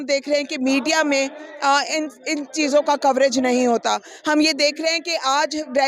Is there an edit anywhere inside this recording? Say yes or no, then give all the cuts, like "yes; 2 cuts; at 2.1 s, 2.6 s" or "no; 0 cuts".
no; 0 cuts